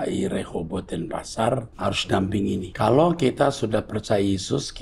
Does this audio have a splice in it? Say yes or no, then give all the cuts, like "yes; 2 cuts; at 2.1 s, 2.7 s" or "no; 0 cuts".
yes; 2 cuts; at 1.7 s, 2.7 s